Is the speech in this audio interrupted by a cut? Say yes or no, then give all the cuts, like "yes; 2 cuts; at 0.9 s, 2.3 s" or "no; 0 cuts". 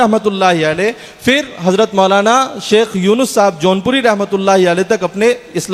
no; 0 cuts